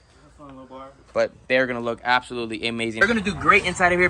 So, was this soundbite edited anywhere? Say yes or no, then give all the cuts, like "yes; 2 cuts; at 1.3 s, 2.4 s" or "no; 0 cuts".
yes; 1 cut; at 3.0 s